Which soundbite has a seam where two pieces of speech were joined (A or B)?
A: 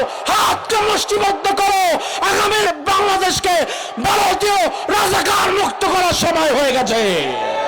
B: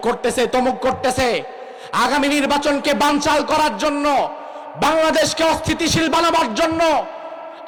A